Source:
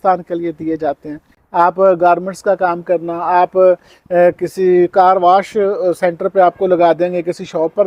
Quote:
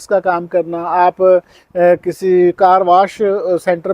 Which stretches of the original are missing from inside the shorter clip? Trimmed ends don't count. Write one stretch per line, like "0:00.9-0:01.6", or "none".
none